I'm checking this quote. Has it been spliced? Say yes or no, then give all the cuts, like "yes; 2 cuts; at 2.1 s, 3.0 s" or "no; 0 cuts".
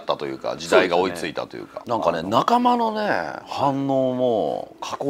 yes; 1 cut; at 1.7 s